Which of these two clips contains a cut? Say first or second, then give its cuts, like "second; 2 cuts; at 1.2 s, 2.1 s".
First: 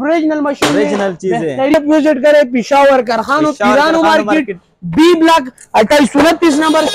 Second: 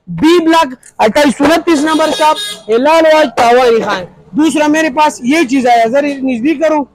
first; 1 cut; at 1.7 s